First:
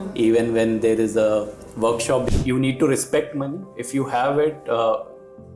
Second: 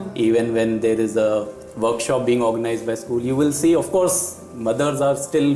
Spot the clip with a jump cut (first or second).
first